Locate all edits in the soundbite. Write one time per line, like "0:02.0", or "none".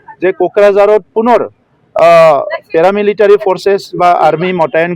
none